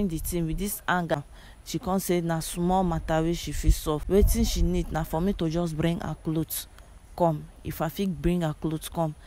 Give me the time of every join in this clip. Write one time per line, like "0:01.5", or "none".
0:01.1
0:04.0